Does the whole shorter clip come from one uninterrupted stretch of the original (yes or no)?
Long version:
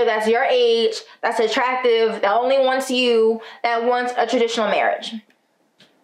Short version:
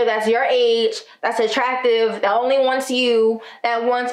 yes